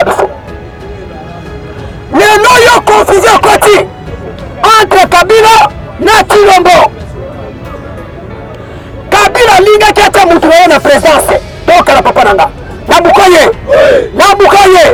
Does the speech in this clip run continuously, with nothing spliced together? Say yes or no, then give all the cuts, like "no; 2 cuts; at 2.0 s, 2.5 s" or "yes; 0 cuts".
yes; 0 cuts